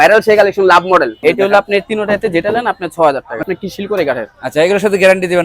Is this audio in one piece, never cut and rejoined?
no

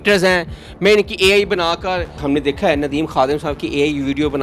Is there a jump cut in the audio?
yes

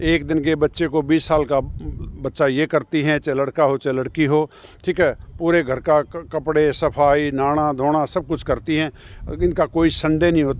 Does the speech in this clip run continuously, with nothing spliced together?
yes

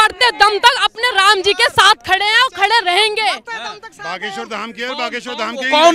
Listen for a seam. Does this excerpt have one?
no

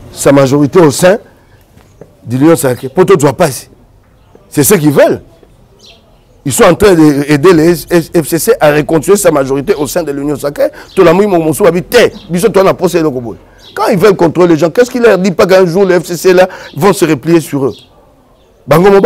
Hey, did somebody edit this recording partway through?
no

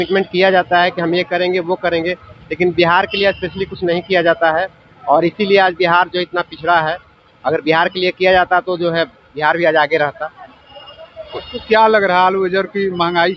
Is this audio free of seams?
yes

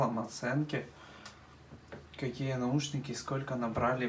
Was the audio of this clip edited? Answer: no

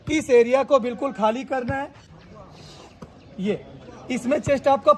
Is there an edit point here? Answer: yes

